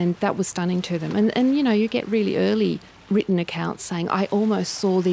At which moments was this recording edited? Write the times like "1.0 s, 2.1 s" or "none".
2.9 s